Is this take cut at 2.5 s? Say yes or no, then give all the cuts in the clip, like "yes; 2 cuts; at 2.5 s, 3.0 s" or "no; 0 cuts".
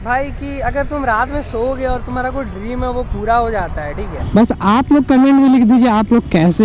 no; 1 cut; at 4.2 s